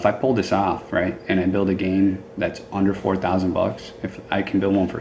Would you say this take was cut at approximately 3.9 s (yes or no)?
no